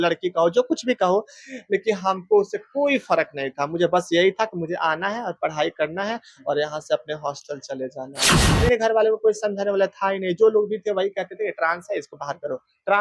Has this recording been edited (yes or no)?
yes